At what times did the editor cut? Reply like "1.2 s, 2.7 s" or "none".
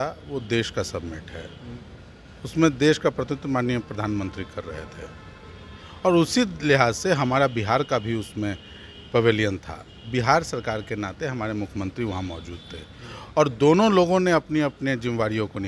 none